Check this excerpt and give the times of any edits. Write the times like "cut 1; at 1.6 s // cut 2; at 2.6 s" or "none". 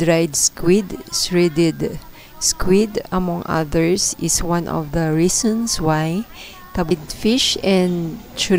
cut 1; at 6.9 s